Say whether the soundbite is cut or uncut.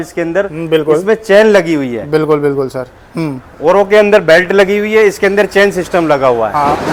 uncut